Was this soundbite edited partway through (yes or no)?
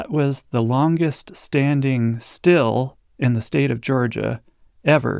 no